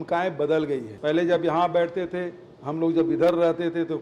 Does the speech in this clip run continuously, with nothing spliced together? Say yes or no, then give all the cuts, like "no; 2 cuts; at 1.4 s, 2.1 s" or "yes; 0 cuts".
no; 1 cut; at 0.9 s